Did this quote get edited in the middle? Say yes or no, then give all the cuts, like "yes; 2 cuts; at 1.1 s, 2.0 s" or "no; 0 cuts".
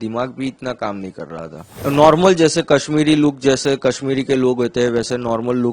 yes; 1 cut; at 1.8 s